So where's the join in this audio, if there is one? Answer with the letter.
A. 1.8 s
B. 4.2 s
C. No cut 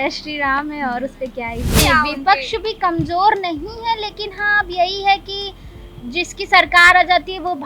A